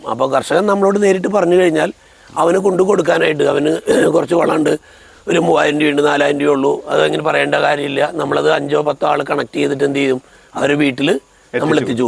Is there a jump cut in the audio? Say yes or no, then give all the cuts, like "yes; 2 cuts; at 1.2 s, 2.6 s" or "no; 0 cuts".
no; 0 cuts